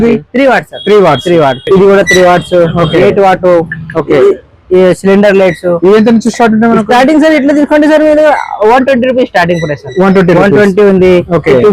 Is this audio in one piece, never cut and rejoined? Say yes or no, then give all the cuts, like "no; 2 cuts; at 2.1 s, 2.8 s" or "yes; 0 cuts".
no; 1 cut; at 1.6 s